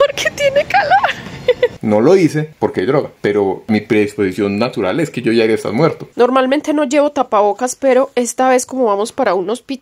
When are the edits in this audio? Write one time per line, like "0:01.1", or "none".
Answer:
0:01.8
0:03.6
0:06.0